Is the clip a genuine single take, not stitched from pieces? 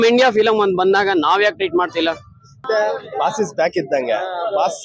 no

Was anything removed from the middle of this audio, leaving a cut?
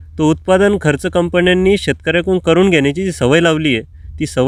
no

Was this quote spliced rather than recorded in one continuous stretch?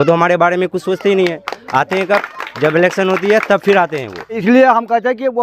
yes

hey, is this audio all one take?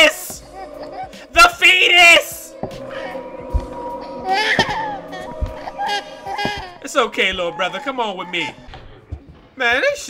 no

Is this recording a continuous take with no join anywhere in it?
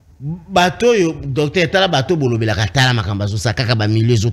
yes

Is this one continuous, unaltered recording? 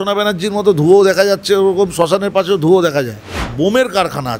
no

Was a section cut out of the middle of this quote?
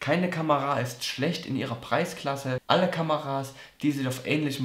yes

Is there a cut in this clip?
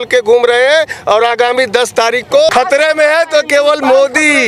yes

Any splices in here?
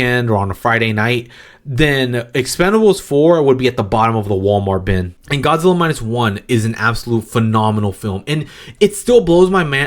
yes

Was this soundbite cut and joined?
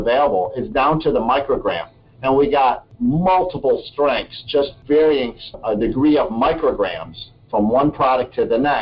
no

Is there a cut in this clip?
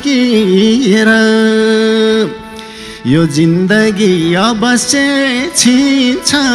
no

